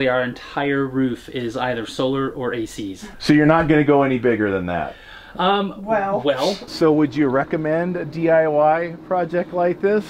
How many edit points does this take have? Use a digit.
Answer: 2